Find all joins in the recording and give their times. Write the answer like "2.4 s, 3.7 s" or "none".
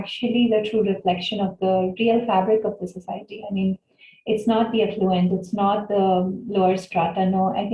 none

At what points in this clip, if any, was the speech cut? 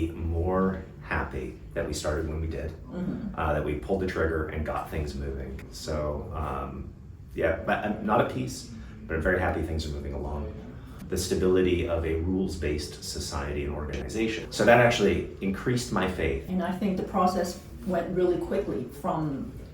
5.6 s, 11.0 s, 14.4 s, 16.4 s

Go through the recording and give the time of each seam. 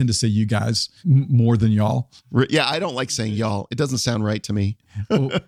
1.0 s

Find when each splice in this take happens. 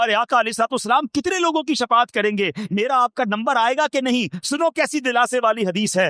none

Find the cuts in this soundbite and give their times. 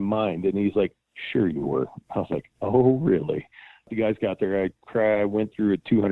3.9 s

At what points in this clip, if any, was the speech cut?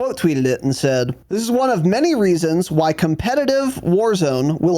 1.2 s

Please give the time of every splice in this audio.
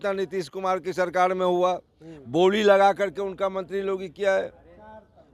none

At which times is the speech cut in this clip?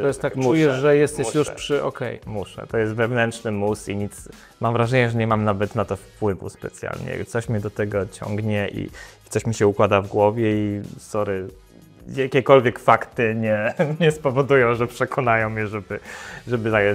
none

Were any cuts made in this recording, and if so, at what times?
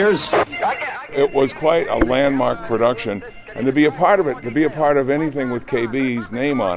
1.1 s

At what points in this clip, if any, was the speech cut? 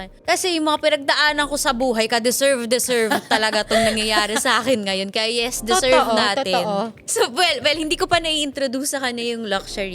none

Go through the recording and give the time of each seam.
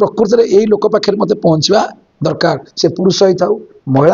none

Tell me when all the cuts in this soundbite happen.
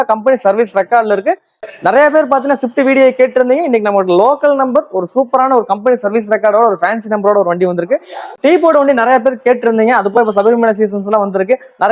1.6 s, 8.3 s

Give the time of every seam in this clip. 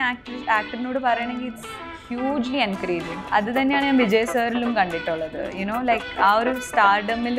3.2 s

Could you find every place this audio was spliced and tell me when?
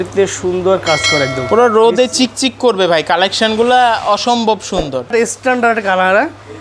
5.1 s

